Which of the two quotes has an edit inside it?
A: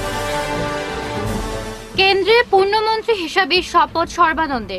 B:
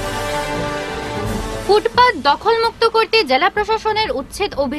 B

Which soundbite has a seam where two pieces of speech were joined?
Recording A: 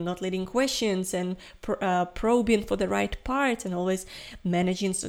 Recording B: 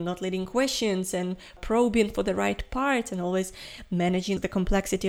B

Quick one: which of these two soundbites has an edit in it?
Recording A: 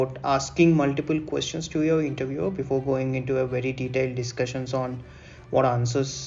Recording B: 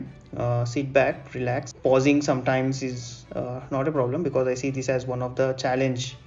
B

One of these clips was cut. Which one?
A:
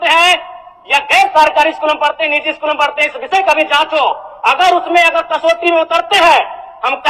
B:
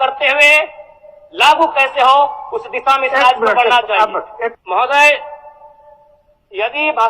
B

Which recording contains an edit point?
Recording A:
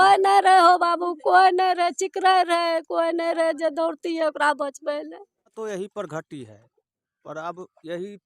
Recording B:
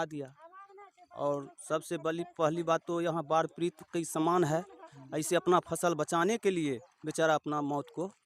A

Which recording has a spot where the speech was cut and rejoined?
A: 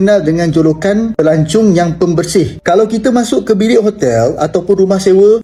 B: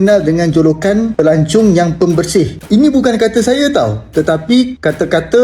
B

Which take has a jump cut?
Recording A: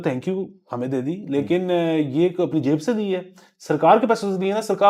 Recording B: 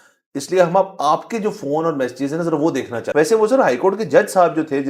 B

